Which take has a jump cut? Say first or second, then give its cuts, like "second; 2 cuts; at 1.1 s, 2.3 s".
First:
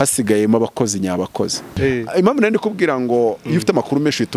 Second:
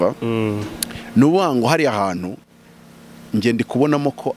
first; 1 cut; at 1.7 s